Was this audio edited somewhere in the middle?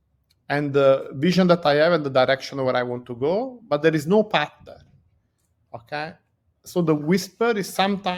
no; 0 cuts

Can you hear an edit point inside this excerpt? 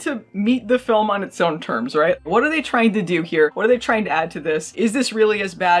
no; 0 cuts

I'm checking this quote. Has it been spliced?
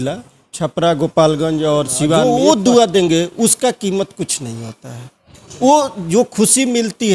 yes; 1 cut; at 2.2 s

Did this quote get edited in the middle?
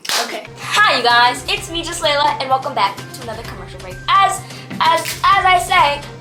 no; 0 cuts

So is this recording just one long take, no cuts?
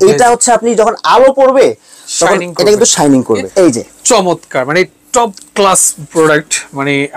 no; 2 cuts; at 3.5 s, 6.0 s

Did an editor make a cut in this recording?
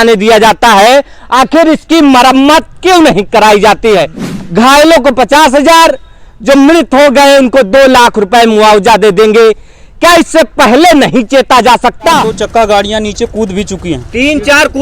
yes; 2 cuts; at 4.2 s, 12.3 s

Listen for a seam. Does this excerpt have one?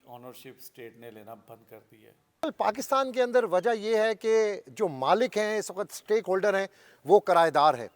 yes; 1 cut; at 2.4 s

